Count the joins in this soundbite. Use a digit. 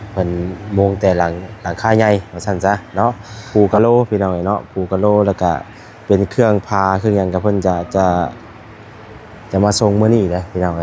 1